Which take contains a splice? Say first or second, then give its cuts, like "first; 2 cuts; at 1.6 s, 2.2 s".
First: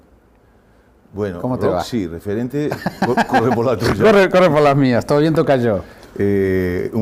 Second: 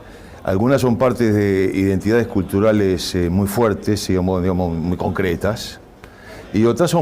second; 1 cut; at 2.0 s